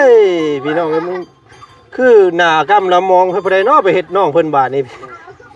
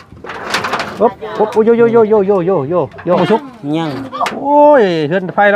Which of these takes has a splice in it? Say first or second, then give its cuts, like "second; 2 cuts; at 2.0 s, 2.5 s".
second; 1 cut; at 3.2 s